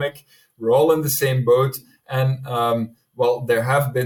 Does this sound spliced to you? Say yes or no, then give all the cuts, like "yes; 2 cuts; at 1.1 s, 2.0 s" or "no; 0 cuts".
no; 0 cuts